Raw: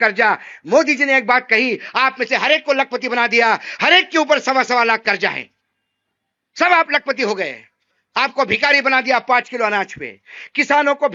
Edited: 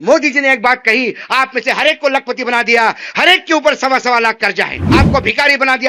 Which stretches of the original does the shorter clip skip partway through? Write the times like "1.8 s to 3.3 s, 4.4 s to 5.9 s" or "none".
5.4 s to 8.0 s